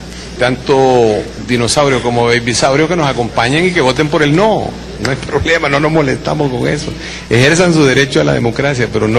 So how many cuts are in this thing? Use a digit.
0